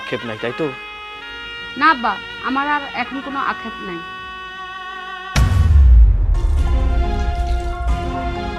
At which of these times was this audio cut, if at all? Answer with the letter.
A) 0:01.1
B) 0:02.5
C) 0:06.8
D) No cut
D